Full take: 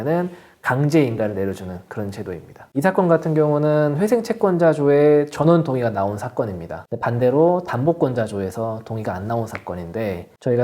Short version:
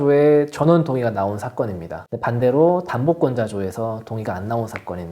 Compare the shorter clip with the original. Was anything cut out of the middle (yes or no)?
no